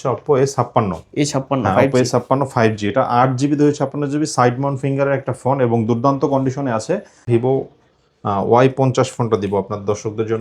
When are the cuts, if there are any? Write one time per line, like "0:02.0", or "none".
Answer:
0:07.3